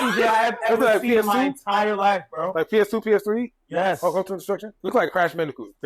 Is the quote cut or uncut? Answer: cut